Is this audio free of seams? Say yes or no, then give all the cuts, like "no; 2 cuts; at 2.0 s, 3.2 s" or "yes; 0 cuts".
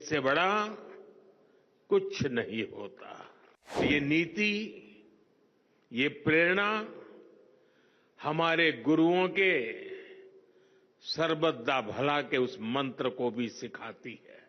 no; 1 cut; at 3.8 s